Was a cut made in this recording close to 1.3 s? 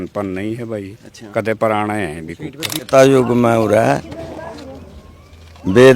no; 1 cut; at 2.8 s

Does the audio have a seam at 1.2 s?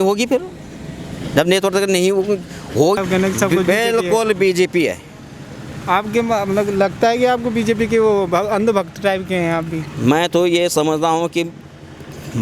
no; 1 cut; at 3.0 s

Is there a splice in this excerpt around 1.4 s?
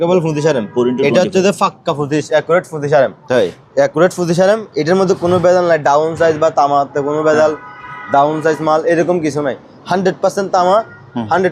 no; 0 cuts

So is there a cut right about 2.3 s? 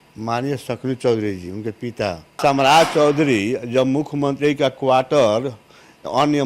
yes; 1 cut; at 2.3 s

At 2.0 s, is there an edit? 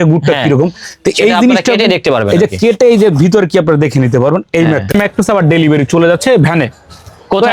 no; 1 cut; at 4.9 s

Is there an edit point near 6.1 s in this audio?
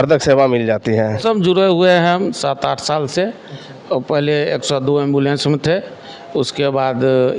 no; 1 cut; at 1.2 s

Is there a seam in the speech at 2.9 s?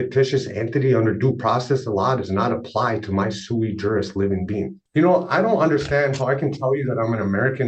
no; 1 cut; at 4.8 s

